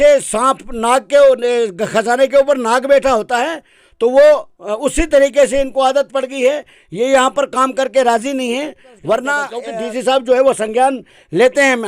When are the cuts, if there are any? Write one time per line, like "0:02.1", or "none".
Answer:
0:09.5

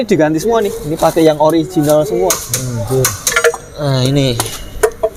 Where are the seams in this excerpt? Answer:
none

